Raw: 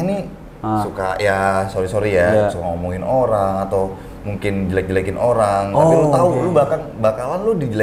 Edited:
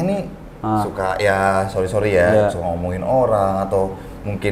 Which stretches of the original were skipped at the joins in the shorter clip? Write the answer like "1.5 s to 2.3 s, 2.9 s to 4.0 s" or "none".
none